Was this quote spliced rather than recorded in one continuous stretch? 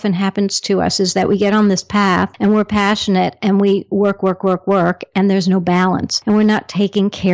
yes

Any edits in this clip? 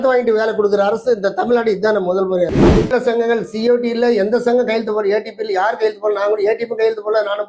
yes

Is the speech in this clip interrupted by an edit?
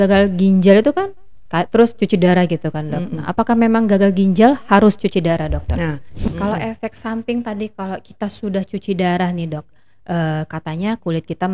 yes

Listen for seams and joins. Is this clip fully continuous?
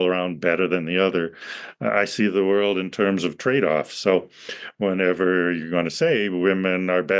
yes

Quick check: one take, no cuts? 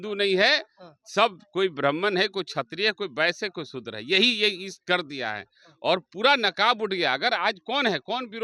yes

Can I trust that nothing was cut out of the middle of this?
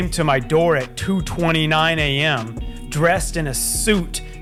yes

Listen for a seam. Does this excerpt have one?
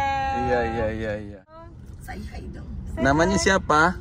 yes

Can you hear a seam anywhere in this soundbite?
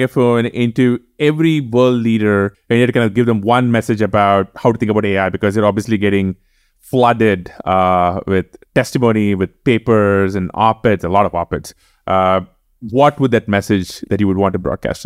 yes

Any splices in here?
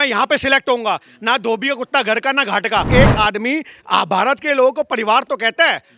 yes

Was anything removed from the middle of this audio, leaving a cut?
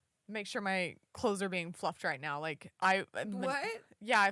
yes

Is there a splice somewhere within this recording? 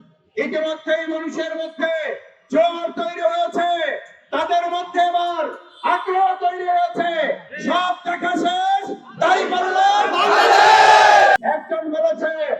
yes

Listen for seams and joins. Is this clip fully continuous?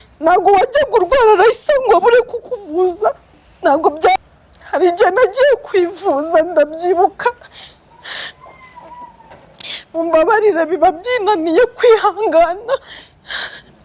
no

